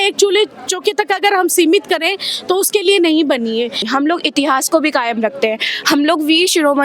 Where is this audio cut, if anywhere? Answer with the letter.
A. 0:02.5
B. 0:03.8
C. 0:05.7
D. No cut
B